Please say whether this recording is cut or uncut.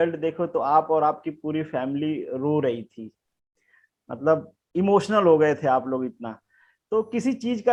uncut